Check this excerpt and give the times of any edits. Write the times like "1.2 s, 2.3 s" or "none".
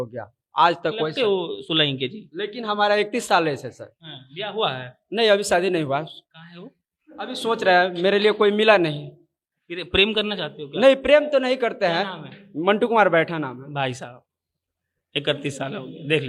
none